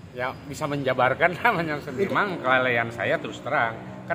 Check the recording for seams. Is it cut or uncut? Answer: cut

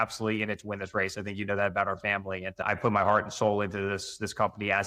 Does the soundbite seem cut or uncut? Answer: uncut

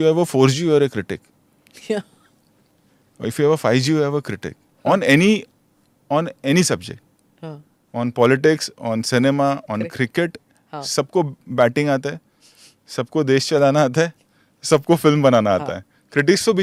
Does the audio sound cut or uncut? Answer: uncut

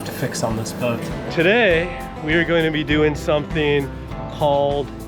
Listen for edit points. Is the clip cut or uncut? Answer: cut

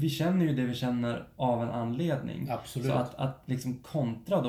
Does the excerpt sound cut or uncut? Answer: uncut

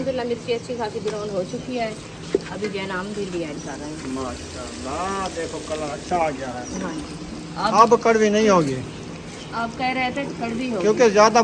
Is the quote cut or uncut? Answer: uncut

